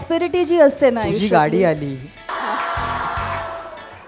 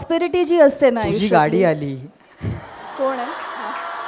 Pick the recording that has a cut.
first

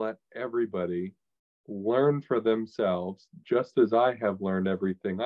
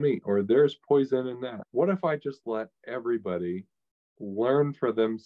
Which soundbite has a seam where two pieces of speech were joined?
second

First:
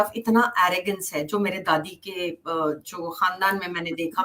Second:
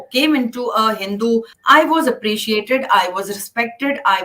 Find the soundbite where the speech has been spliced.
second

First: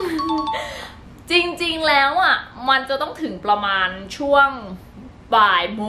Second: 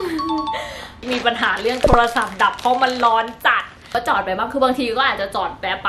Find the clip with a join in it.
second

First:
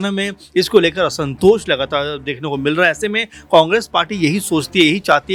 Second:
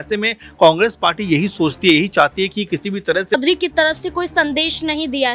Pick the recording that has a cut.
second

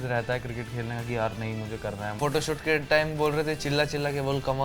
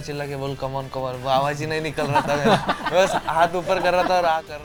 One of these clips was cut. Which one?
first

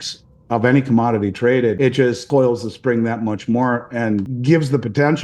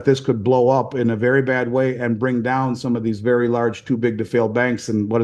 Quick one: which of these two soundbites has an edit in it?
first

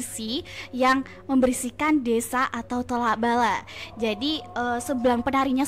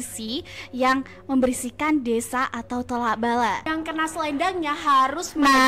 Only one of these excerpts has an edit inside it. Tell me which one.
second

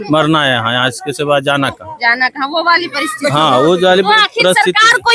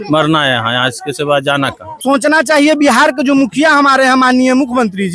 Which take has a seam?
second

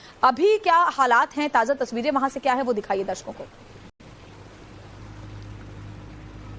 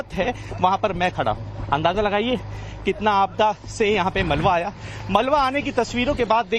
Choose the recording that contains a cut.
first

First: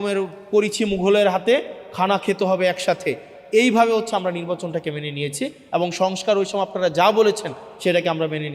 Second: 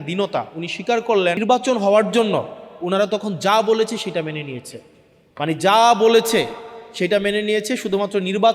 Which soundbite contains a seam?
second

